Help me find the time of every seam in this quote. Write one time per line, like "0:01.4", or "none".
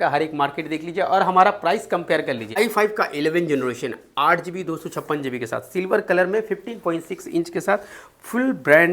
0:02.6